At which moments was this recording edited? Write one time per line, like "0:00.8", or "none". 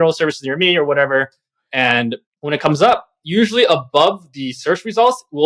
0:02.3